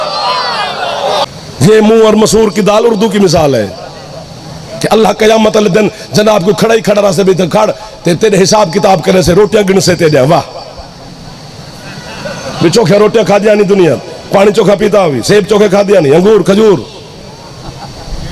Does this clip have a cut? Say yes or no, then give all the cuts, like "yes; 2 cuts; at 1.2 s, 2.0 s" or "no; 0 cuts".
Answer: yes; 1 cut; at 1.2 s